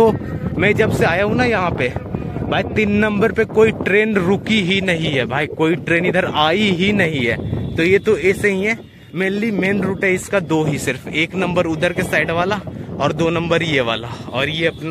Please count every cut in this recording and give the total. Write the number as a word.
zero